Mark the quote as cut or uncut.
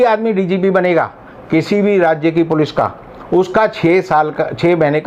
uncut